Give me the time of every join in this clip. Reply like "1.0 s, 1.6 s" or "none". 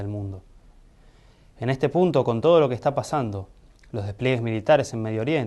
3.3 s